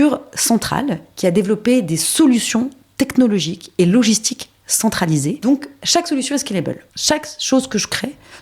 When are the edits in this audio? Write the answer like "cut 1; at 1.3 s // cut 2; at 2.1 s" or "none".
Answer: cut 1; at 5.4 s // cut 2; at 6.9 s